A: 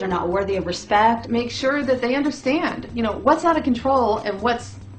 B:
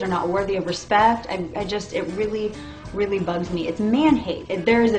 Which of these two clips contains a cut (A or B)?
A